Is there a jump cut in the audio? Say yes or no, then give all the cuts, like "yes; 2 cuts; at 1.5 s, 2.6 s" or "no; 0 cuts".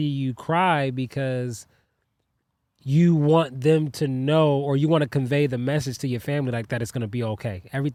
no; 0 cuts